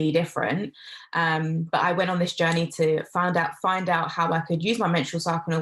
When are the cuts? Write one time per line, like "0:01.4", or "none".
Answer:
none